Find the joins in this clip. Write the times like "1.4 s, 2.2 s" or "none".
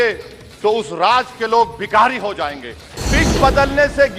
3.0 s